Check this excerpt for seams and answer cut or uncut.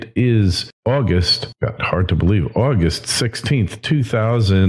uncut